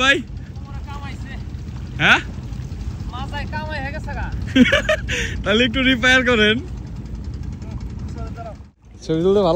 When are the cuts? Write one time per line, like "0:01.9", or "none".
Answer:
0:08.7